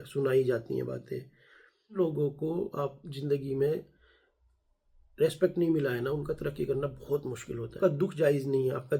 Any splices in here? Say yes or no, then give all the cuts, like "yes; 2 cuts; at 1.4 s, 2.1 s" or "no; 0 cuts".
yes; 2 cuts; at 1.9 s, 7.8 s